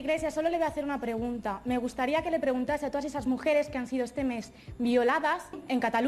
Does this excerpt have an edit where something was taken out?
no; 0 cuts

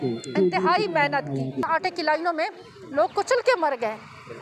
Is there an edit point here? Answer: yes; 1 cut; at 1.7 s

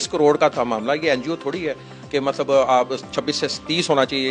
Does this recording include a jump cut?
no; 0 cuts

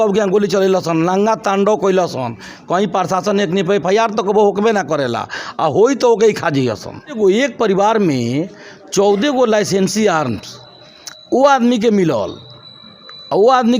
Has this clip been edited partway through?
yes; 1 cut; at 7.1 s

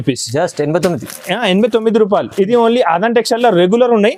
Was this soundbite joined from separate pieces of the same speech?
no; 0 cuts

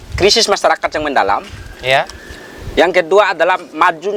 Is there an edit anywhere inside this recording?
no; 0 cuts

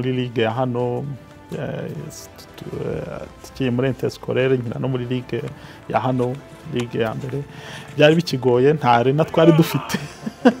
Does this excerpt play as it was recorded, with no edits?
yes; 0 cuts

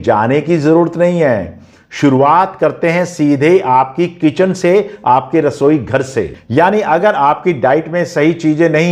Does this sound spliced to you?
yes; 1 cut; at 6.4 s

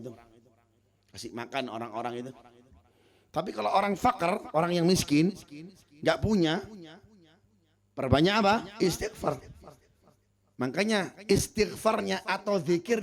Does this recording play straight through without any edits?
yes; 0 cuts

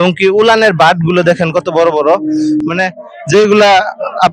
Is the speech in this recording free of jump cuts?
yes; 0 cuts

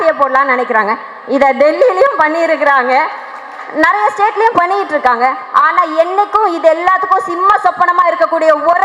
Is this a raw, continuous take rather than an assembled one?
yes; 0 cuts

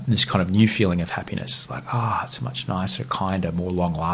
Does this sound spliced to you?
no; 0 cuts

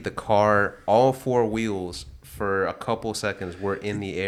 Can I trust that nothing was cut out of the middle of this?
yes; 0 cuts

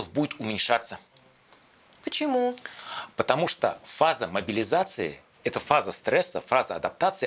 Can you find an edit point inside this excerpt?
no; 0 cuts

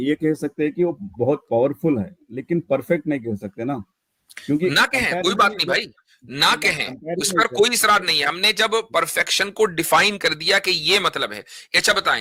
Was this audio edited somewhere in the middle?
no; 0 cuts

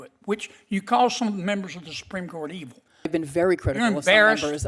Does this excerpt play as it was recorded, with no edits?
no; 1 cut; at 3.1 s

